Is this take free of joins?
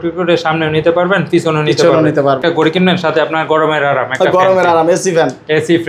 no; 1 cut; at 2.4 s

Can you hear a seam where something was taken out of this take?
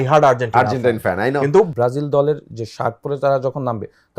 yes; 1 cut; at 1.7 s

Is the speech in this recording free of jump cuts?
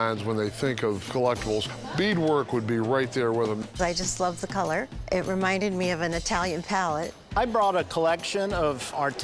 no; 4 cuts; at 1.7 s, 3.6 s, 5.0 s, 7.3 s

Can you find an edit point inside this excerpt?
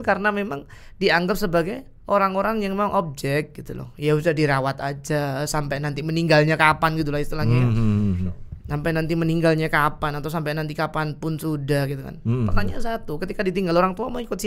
no; 0 cuts

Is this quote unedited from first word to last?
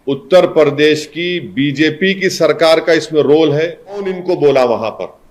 no; 1 cut; at 4.2 s

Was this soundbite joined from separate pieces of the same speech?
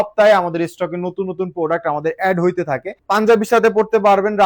yes; 1 cut; at 3.0 s

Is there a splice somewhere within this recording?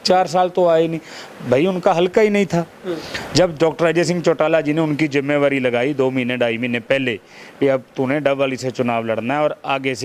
no; 0 cuts

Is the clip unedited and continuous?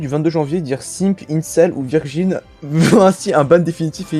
yes; 0 cuts

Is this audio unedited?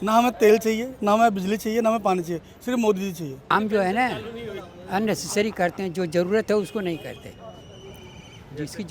no; 1 cut; at 3.5 s

